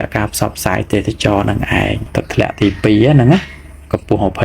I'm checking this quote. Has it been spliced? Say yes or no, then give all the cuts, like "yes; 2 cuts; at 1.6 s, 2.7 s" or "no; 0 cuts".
yes; 1 cut; at 2.0 s